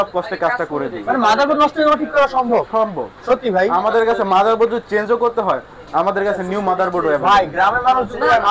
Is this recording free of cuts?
yes; 0 cuts

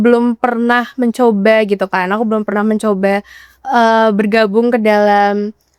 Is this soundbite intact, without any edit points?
yes; 0 cuts

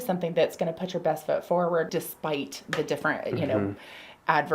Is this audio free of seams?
no; 1 cut; at 1.9 s

